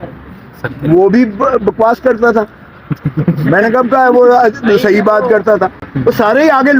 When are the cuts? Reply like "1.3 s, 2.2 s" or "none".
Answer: none